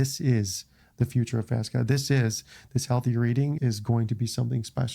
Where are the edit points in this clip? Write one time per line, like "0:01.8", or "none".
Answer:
0:03.6